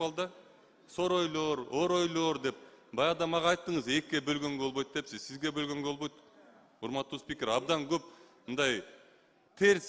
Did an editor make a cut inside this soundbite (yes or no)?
no